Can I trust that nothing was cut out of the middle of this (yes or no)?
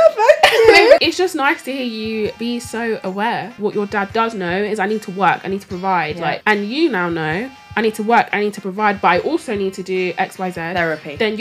no